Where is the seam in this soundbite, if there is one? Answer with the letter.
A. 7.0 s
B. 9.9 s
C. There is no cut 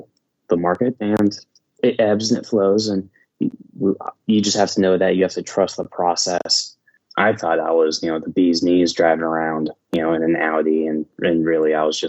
A